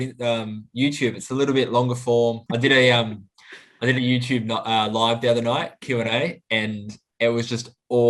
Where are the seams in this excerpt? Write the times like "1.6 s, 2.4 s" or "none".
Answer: 2.4 s